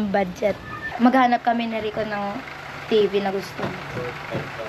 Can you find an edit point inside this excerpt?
yes; 1 cut; at 0.9 s

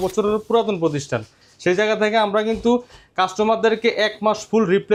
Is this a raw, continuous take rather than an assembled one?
yes; 0 cuts

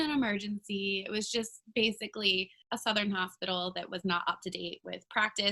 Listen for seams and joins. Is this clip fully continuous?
no; 1 cut; at 2.6 s

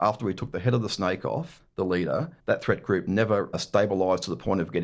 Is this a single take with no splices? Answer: no; 3 cuts; at 1.6 s, 2.3 s, 3.6 s

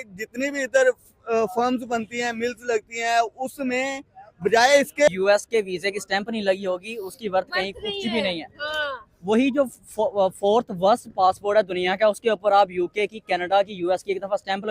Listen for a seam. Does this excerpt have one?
yes; 1 cut; at 5.1 s

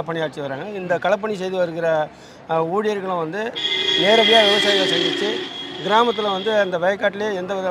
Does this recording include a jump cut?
no; 0 cuts

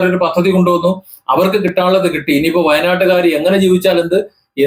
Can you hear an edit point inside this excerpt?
no; 0 cuts

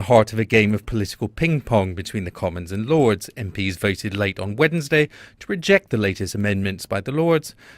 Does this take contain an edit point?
yes; 1 cut; at 3.1 s

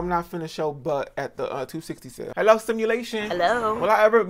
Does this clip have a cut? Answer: yes; 1 cut; at 2.3 s

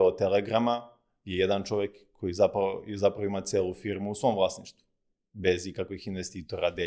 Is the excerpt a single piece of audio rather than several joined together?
yes; 0 cuts

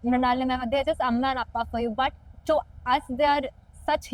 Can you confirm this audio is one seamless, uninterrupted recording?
yes; 0 cuts

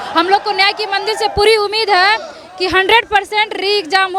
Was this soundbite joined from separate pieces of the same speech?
no; 0 cuts

